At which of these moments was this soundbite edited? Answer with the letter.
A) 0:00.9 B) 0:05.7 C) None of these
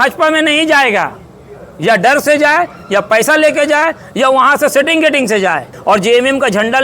B